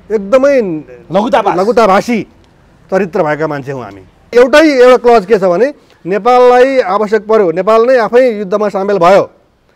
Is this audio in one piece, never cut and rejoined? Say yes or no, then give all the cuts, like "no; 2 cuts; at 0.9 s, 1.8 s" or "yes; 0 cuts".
no; 1 cut; at 4.3 s